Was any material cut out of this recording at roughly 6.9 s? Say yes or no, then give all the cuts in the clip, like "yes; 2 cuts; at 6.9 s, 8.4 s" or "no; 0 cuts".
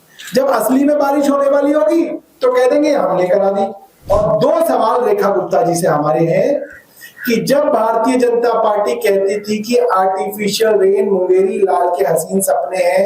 no; 1 cut; at 3.9 s